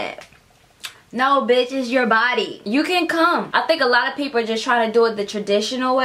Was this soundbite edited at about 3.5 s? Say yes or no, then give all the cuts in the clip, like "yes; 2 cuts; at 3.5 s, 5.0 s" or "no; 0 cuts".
yes; 2 cuts; at 2.6 s, 3.5 s